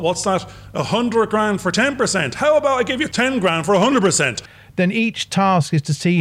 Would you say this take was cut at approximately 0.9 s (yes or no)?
no